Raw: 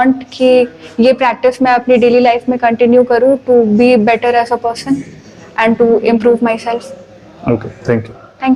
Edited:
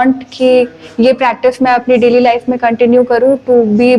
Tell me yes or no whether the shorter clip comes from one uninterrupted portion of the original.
yes